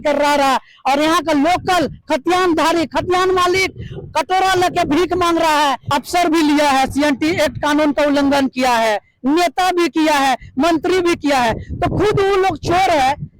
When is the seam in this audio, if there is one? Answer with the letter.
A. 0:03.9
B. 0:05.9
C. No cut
B